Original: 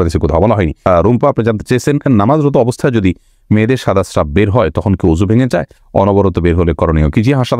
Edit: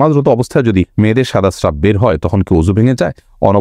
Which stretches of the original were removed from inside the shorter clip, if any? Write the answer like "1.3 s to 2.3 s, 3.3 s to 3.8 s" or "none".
3.2 s to 3.4 s